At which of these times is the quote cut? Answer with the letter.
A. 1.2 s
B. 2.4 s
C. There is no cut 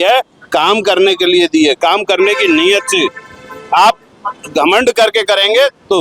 C